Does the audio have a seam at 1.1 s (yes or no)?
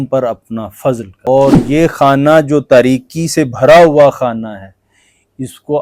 yes